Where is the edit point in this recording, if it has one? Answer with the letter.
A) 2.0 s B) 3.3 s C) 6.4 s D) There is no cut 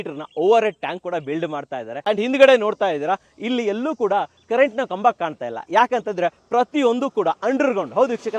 A